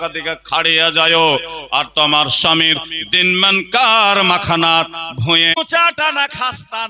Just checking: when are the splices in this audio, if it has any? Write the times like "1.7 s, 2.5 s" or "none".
5.6 s